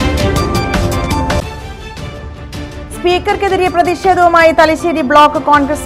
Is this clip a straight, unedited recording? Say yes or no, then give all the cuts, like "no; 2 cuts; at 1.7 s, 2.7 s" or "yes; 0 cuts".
no; 1 cut; at 1.1 s